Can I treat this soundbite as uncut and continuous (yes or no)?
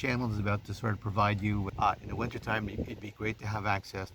no